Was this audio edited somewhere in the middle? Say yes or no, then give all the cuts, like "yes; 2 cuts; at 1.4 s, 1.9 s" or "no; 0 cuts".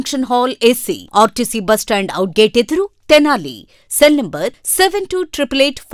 no; 0 cuts